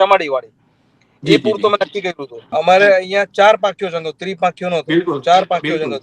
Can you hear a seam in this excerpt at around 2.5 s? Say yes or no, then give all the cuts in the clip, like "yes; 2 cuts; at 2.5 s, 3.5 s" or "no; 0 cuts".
yes; 1 cut; at 2.5 s